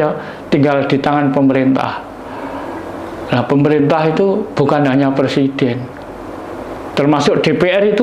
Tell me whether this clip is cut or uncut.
uncut